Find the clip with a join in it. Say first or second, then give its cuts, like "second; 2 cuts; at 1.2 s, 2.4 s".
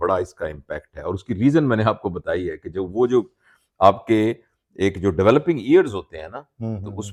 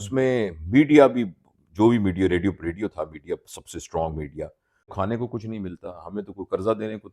second; 1 cut; at 4.9 s